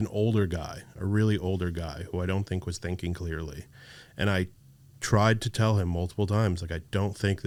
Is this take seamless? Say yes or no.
yes